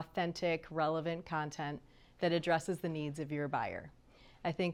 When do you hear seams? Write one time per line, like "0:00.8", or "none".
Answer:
none